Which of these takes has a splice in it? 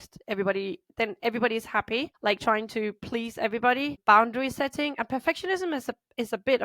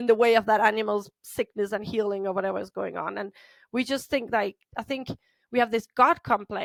first; 2 cuts; at 2.1 s, 4.0 s

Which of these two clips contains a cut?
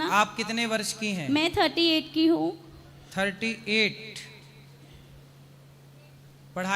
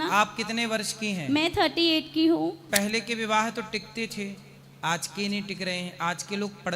second; 1 cut; at 2.7 s

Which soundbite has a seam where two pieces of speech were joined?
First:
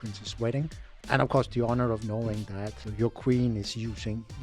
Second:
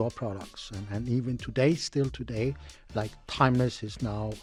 first; 2 cuts; at 0.9 s, 2.8 s

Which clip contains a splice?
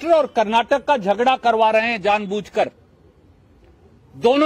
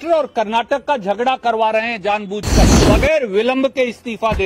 second; 1 cut; at 2.8 s

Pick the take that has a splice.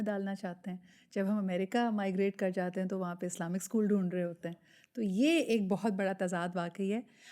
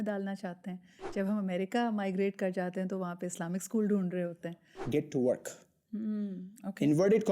second; 1 cut; at 4.8 s

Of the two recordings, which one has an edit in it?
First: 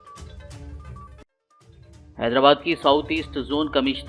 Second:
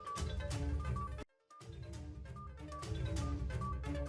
first; 1 cut; at 2.0 s

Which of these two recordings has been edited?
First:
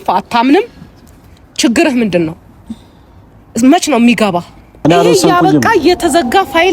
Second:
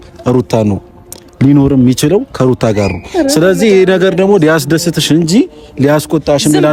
first; 1 cut; at 4.7 s

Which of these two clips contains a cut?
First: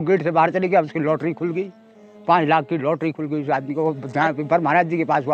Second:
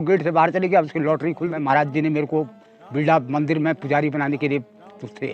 second; 1 cut; at 1.5 s

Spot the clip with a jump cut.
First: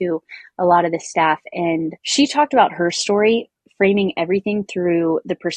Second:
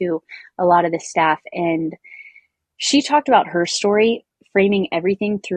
first; 1 cut; at 2.0 s

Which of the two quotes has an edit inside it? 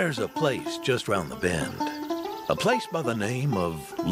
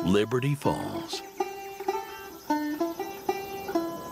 second; 1 cut; at 1.9 s

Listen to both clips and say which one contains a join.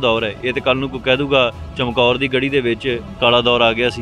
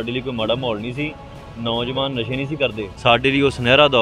second; 1 cut; at 2.9 s

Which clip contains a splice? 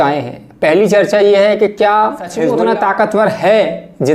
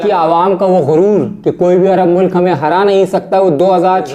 first; 1 cut; at 2.5 s

